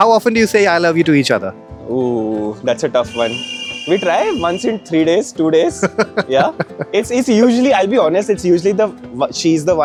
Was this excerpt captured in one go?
yes; 0 cuts

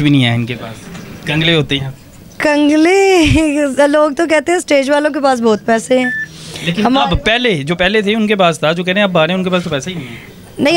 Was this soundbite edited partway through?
no; 0 cuts

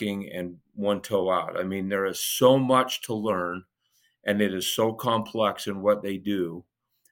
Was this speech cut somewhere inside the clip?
no; 0 cuts

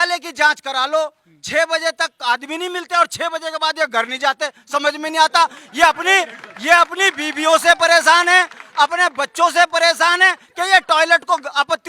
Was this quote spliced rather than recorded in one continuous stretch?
no; 0 cuts

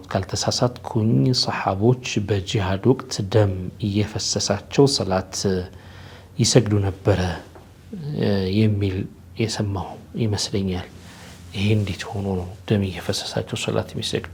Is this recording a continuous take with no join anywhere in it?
yes; 0 cuts

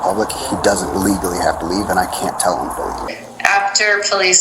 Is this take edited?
yes; 1 cut; at 3.1 s

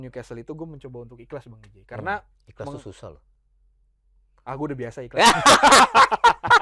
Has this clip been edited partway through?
no; 0 cuts

